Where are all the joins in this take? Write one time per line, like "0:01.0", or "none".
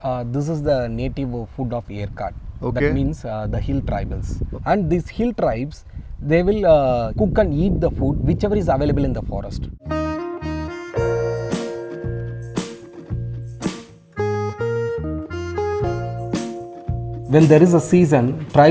0:04.3
0:09.8